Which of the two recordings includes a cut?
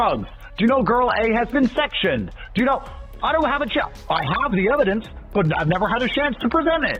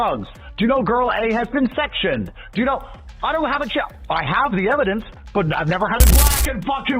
second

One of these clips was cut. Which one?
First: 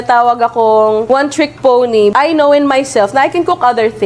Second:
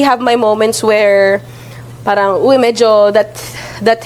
first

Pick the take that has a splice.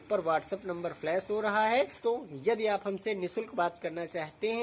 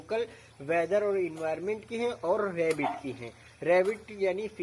first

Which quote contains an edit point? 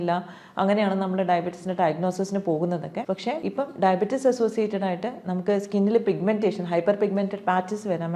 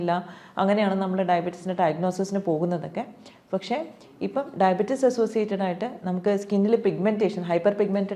first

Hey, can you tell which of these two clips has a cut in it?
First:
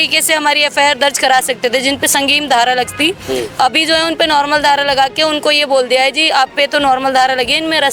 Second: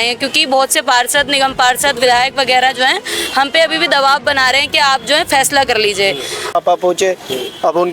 second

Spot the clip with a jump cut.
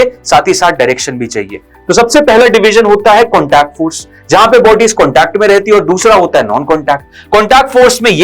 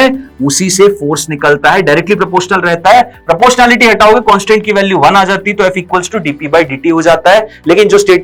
first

